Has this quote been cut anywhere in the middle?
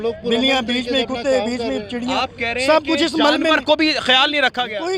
no; 0 cuts

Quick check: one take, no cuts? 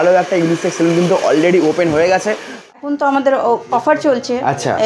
no; 1 cut; at 2.6 s

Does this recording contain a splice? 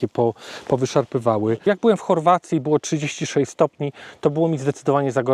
yes; 1 cut; at 1.6 s

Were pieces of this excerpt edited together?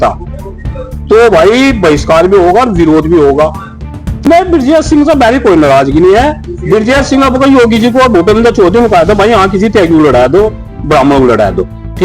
yes; 1 cut; at 4.1 s

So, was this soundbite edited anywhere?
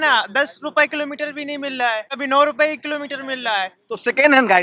yes; 1 cut; at 2.1 s

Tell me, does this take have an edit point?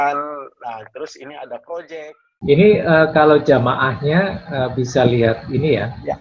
yes; 1 cut; at 2.2 s

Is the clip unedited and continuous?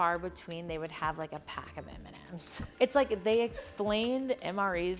no; 1 cut; at 2.7 s

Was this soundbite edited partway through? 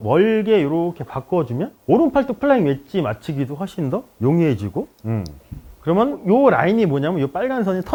no; 0 cuts

